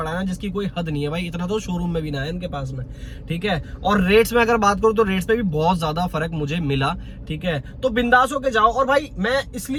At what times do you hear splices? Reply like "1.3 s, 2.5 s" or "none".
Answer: none